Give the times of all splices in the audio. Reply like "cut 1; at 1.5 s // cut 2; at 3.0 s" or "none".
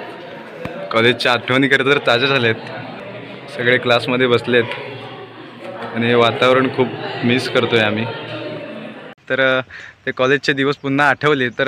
cut 1; at 2.9 s // cut 2; at 9.2 s